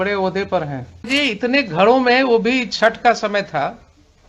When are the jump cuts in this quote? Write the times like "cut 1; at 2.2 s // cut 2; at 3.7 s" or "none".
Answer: cut 1; at 1.1 s